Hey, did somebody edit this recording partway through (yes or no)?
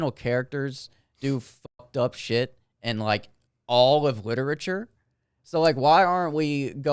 no